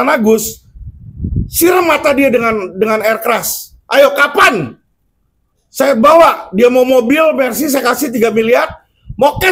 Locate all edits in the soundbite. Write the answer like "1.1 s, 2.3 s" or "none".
none

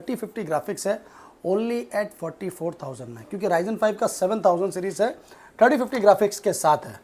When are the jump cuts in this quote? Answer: none

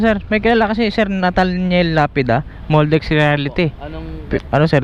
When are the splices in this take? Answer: none

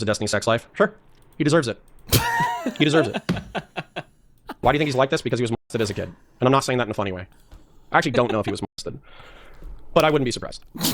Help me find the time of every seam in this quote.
4.5 s

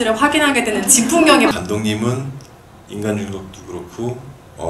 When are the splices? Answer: 1.5 s

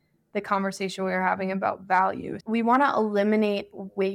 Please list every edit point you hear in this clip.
2.4 s

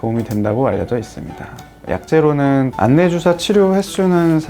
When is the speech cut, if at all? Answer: 2.7 s

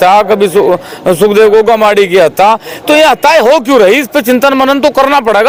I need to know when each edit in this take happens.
none

